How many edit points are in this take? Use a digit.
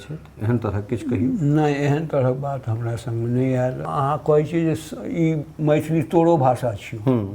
1